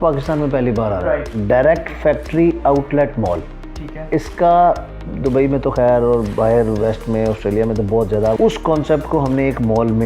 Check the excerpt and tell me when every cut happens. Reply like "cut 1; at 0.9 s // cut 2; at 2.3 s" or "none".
cut 1; at 8.4 s

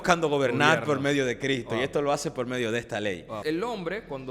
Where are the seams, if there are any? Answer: cut 1; at 3.4 s

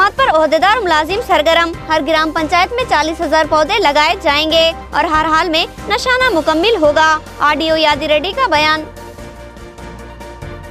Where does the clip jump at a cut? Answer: none

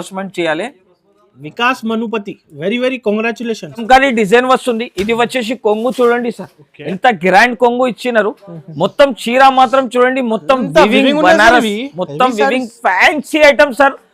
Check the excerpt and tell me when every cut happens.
cut 1; at 3.8 s

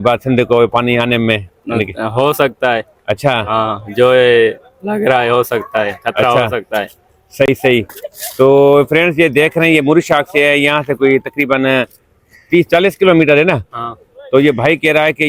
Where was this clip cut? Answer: none

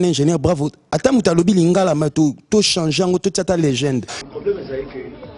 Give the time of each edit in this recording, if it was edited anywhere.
cut 1; at 4.2 s

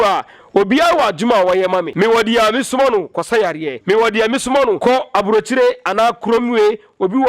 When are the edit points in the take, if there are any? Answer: cut 1; at 1.9 s // cut 2; at 3.7 s // cut 3; at 4.8 s

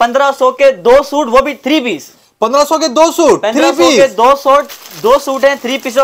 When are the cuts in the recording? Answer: none

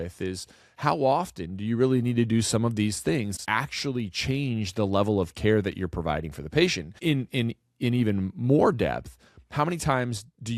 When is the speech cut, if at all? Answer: cut 1; at 3.4 s // cut 2; at 7.0 s

